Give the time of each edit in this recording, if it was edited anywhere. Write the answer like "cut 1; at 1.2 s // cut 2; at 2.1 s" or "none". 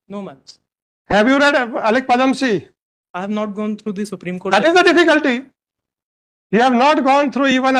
none